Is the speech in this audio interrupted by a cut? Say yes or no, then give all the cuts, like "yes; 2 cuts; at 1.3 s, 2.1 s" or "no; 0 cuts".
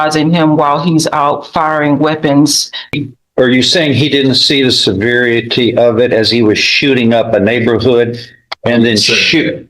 yes; 1 cut; at 3.0 s